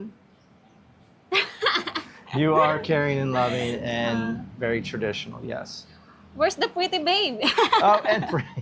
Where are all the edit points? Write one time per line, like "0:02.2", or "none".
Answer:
none

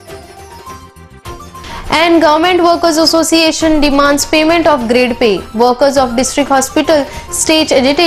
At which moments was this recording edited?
0:01.3

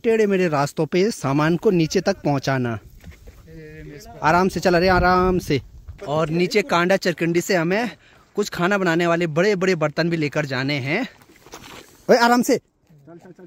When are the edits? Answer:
none

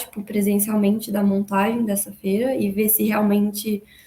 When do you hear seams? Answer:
none

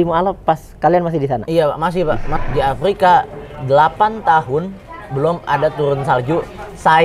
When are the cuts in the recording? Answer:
0:02.3

